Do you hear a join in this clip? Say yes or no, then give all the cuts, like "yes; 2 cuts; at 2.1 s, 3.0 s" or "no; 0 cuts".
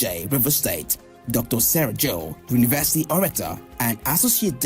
yes; 1 cut; at 1.8 s